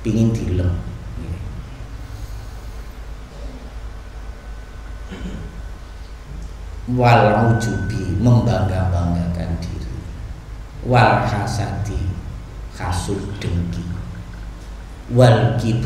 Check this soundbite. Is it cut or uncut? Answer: uncut